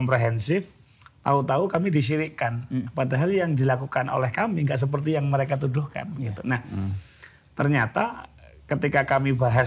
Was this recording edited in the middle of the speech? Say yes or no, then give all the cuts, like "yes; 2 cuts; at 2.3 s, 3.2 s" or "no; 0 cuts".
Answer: no; 0 cuts